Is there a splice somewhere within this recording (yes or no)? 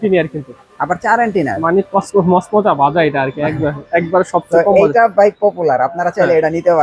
no